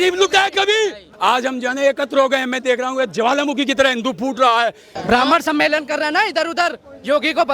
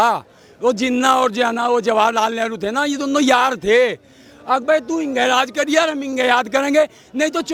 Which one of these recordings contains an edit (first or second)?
first